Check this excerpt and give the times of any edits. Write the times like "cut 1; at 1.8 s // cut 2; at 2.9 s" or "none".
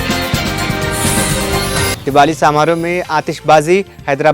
cut 1; at 1.9 s